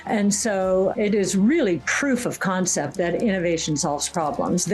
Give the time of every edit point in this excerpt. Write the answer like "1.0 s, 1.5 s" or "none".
0.9 s